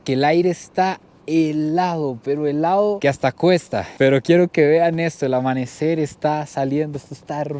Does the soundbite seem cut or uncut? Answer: uncut